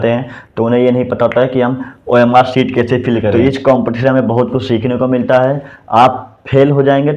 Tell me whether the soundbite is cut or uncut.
cut